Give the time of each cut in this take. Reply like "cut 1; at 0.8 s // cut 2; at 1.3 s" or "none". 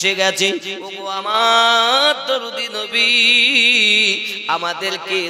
none